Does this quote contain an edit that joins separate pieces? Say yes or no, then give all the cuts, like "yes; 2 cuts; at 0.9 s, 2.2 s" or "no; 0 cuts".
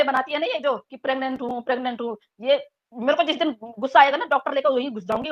no; 0 cuts